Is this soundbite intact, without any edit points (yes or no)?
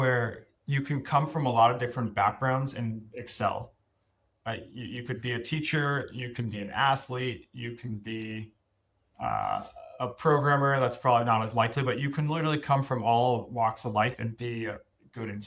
yes